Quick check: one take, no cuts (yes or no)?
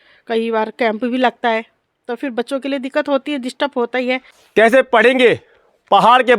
no